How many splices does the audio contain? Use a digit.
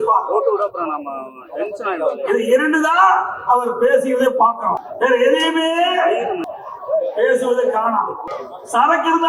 3